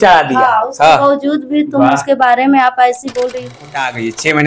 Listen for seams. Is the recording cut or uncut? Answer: cut